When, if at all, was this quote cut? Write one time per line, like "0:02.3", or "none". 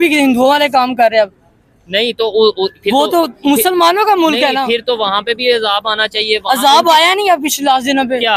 none